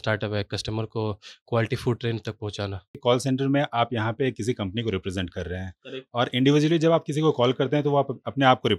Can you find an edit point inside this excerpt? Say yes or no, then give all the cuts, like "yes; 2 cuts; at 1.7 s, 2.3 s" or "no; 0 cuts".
yes; 1 cut; at 3.0 s